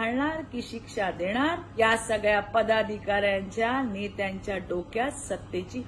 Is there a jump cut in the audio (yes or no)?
yes